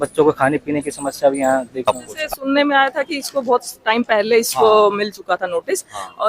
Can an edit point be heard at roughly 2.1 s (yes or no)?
yes